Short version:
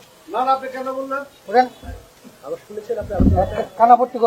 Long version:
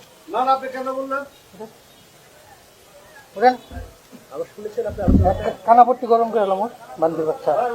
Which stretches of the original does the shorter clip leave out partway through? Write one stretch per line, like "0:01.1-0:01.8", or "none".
0:01.3-0:03.2

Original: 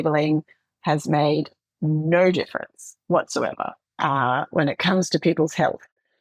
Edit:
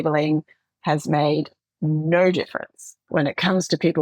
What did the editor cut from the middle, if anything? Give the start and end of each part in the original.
0:03.0-0:04.5

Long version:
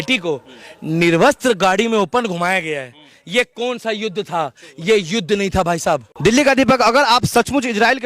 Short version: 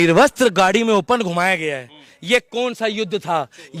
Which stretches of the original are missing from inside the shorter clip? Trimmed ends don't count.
none

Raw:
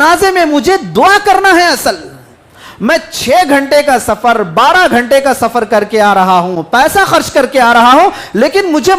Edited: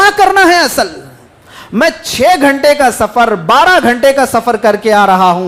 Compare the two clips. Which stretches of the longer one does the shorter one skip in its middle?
none

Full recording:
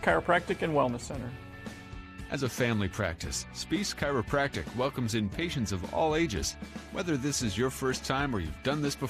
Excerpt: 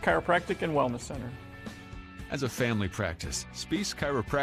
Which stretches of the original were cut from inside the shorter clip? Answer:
none

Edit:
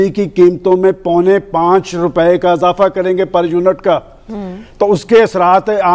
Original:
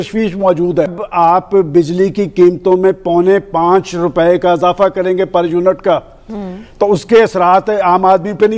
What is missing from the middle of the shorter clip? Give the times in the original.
none

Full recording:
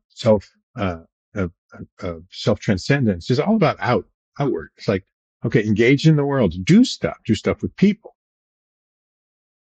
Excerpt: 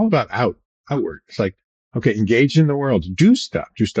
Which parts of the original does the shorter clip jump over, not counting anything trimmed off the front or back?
none

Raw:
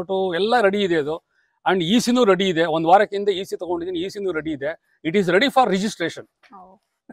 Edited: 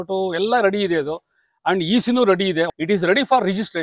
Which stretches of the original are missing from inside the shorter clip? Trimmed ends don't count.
0:02.7-0:04.9

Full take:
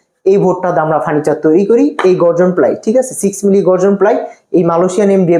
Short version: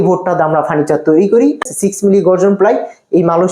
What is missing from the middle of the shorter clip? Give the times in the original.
0:02.0-0:03.0

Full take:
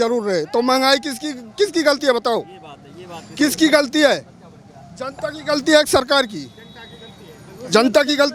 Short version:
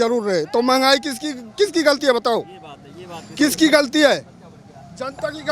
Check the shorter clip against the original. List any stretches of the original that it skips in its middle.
none

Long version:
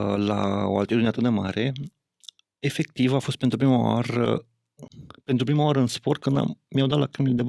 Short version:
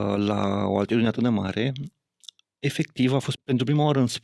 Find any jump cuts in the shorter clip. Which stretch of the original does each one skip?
0:03.3-0:05.1

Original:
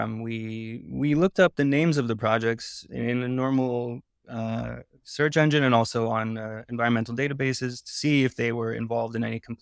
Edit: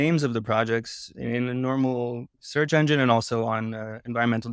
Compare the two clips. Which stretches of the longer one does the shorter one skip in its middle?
0:04.1-0:05.0

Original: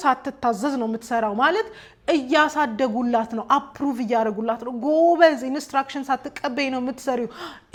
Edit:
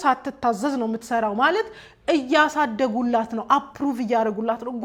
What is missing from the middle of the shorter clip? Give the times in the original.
none

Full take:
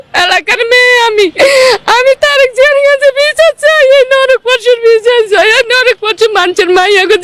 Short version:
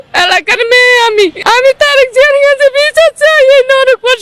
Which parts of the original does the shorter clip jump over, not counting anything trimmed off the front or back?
0:01.4-0:01.8

